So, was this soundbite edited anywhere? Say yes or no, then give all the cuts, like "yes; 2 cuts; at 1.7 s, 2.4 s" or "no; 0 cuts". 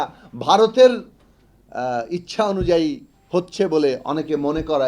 no; 0 cuts